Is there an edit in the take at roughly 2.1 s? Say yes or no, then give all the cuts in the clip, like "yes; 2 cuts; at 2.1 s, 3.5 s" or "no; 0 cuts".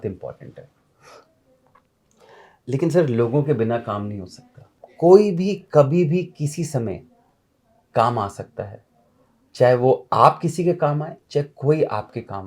no; 1 cut; at 4.8 s